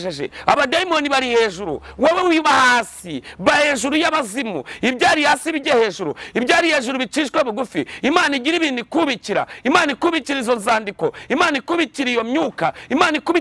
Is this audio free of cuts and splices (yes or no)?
yes